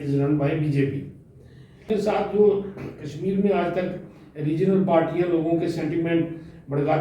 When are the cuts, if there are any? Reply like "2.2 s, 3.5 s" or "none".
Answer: 1.9 s